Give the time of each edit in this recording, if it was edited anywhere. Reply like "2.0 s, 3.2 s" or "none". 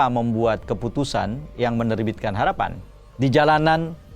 2.9 s